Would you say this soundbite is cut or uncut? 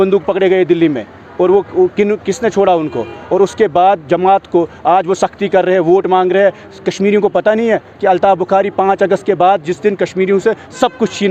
uncut